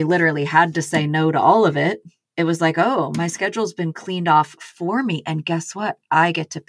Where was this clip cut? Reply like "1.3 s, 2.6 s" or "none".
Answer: none